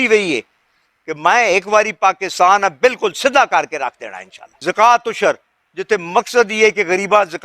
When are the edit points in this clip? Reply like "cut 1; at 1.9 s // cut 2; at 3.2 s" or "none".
cut 1; at 4.6 s